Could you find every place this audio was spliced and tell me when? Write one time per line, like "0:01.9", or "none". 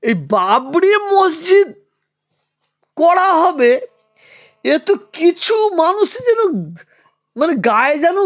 none